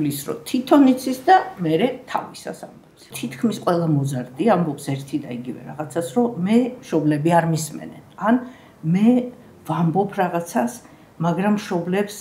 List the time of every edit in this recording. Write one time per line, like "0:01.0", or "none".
0:03.1